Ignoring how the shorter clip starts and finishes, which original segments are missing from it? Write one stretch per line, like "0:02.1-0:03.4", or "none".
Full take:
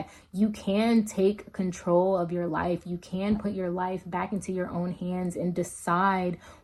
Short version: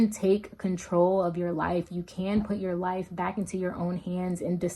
none